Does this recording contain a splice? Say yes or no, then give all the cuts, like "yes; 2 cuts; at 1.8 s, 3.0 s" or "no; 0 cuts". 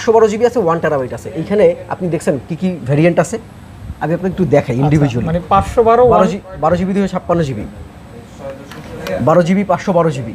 no; 0 cuts